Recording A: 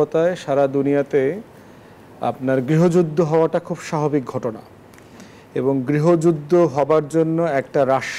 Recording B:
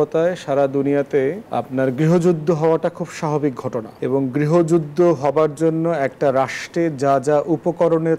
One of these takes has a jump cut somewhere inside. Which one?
B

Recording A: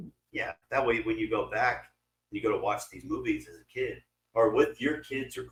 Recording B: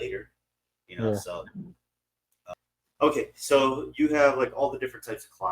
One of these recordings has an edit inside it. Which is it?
B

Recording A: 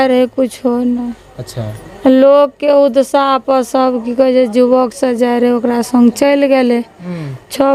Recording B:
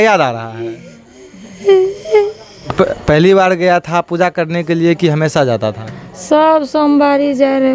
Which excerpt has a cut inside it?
B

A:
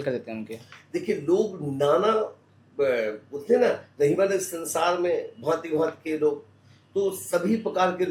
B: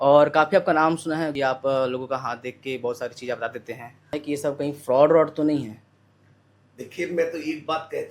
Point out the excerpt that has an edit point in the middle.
B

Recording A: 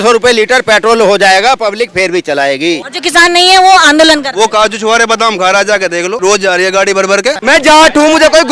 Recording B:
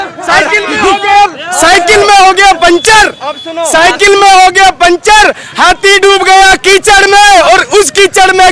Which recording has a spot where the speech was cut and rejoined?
A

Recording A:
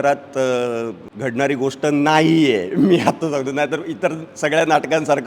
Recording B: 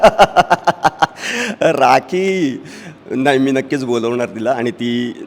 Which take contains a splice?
A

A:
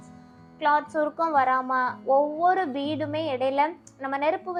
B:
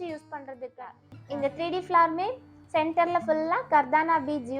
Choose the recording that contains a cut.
B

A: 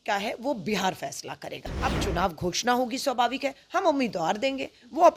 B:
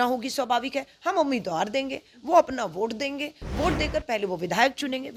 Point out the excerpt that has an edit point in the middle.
A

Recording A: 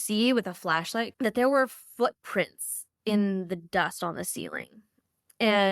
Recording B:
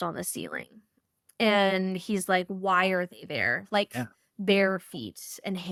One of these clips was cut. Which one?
A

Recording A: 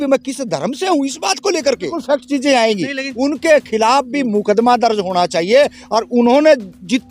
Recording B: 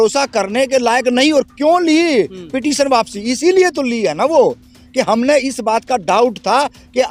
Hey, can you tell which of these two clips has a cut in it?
A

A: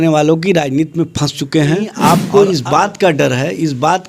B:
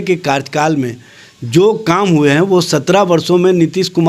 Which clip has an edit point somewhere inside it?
A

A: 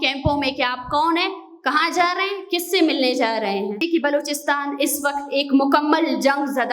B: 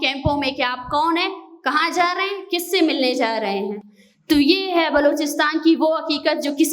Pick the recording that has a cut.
A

